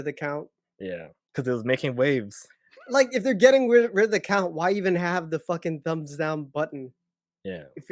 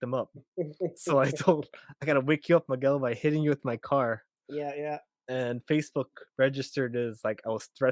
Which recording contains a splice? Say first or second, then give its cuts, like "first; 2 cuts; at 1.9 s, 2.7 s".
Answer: first; 1 cut; at 1.2 s